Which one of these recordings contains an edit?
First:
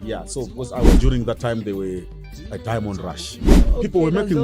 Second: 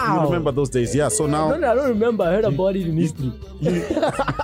first; 2 cuts; at 1.0 s, 3.5 s

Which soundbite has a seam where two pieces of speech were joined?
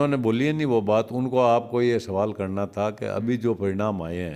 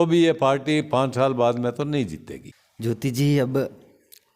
second; 1 cut; at 3.0 s

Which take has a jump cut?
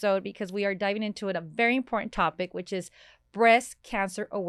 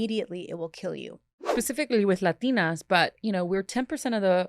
second; 1 cut; at 1.5 s

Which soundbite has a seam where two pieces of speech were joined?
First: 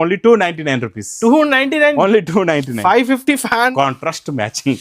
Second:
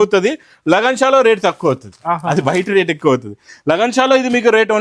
first; 1 cut; at 3.7 s

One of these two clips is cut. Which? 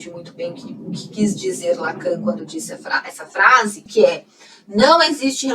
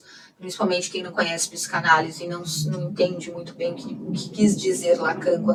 first; 1 cut; at 3.8 s

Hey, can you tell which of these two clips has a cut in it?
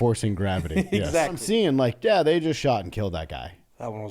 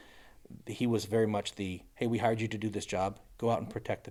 first; 1 cut; at 1.4 s

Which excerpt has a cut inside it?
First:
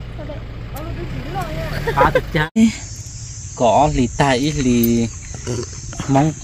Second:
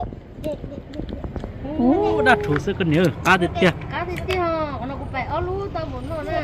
first; 1 cut; at 2.6 s

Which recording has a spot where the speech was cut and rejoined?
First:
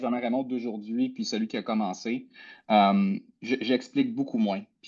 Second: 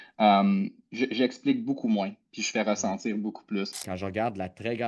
second; 1 cut; at 3.8 s

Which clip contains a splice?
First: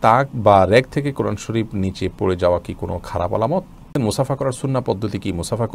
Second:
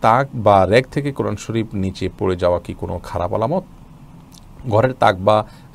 first; 1 cut; at 3.9 s

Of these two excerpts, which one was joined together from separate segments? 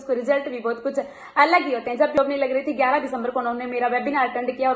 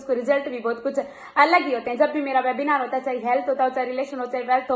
first; 1 cut; at 2.2 s

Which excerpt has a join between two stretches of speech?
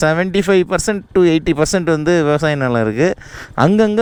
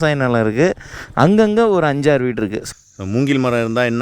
second; 1 cut; at 2.6 s

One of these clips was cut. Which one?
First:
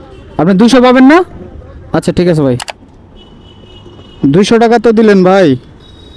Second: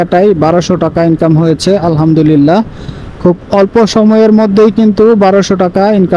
first; 1 cut; at 2.6 s

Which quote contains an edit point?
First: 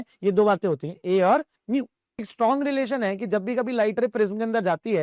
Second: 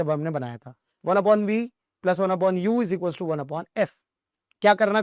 first; 1 cut; at 2.3 s

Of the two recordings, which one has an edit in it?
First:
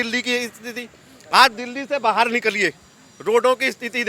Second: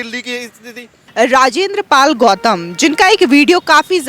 second; 1 cut; at 1.0 s

